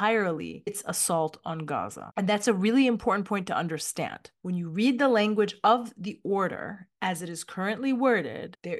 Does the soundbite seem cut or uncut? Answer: uncut